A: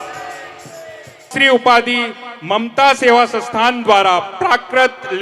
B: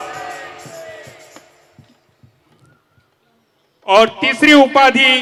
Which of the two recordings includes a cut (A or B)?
A